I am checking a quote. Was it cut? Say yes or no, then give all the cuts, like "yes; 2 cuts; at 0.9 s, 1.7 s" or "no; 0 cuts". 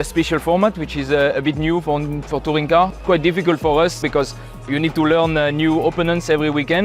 yes; 2 cuts; at 2.9 s, 4.1 s